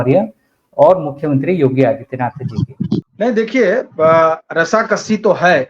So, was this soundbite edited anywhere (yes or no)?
yes